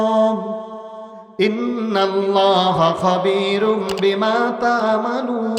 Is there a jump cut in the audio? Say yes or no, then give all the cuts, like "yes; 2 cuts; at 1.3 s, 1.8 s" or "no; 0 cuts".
no; 0 cuts